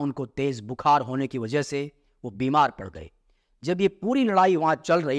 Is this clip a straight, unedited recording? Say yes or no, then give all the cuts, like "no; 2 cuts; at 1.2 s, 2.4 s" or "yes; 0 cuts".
yes; 0 cuts